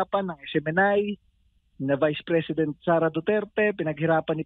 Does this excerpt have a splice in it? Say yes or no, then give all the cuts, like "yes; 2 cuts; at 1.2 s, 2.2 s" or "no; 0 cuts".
no; 0 cuts